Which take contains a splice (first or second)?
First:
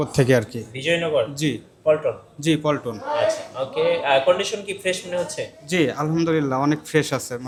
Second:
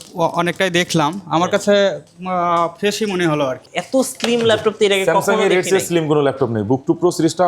second